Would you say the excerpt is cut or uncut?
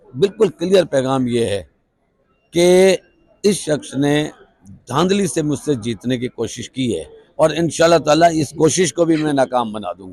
uncut